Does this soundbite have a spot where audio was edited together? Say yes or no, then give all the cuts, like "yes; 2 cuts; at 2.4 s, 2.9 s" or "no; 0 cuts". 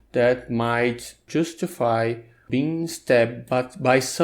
yes; 2 cuts; at 1.2 s, 2.4 s